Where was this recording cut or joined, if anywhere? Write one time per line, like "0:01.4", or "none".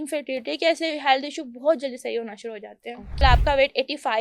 0:03.1